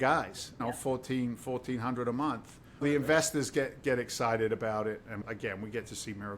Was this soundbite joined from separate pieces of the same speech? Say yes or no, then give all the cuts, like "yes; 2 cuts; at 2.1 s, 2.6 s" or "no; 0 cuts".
yes; 2 cuts; at 2.8 s, 5.2 s